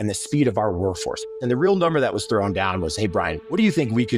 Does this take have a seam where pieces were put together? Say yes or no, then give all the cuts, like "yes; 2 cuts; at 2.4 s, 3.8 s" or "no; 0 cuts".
yes; 1 cut; at 1.2 s